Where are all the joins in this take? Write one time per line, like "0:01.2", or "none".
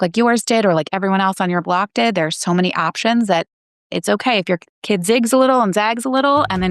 none